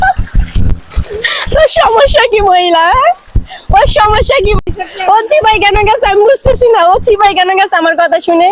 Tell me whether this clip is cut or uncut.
cut